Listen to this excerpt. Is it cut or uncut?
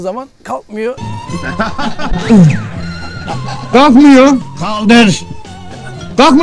uncut